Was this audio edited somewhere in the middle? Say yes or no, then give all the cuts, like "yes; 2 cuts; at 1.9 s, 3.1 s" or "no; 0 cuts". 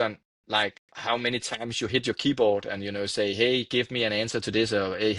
no; 0 cuts